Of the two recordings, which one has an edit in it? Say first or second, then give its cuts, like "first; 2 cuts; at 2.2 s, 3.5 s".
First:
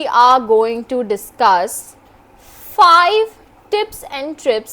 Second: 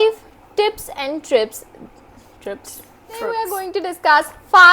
second; 1 cut; at 3.3 s